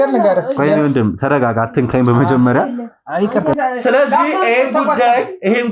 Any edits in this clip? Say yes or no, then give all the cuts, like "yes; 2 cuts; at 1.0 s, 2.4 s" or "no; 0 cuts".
yes; 1 cut; at 3.6 s